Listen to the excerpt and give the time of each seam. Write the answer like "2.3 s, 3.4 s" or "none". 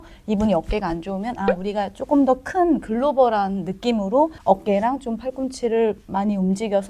none